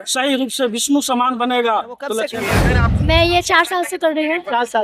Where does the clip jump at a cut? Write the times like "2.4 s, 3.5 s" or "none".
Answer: 2.5 s